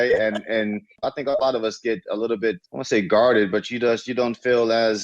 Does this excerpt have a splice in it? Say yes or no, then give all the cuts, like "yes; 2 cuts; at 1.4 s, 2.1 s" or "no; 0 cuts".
yes; 1 cut; at 1.0 s